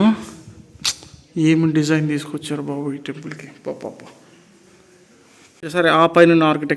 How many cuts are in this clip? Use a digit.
1